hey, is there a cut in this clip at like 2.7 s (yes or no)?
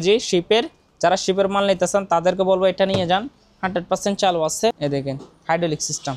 no